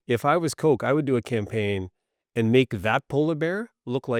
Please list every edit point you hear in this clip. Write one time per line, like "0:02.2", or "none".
none